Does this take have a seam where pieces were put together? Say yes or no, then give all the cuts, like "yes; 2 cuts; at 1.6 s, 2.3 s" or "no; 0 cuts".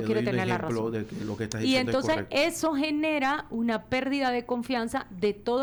no; 0 cuts